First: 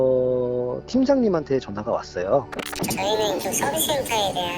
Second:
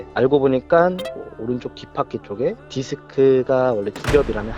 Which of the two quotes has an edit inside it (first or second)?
first